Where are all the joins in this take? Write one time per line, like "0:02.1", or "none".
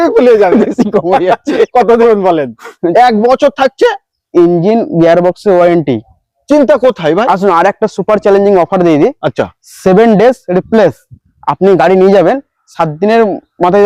0:02.9